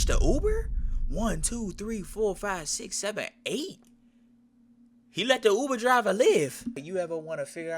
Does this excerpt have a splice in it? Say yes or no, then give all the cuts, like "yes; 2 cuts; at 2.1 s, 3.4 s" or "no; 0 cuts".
yes; 1 cut; at 6.8 s